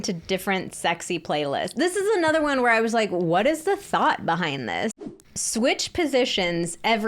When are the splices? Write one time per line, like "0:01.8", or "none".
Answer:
0:04.9